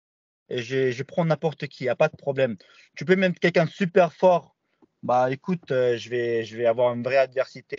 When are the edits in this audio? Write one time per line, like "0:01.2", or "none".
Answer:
none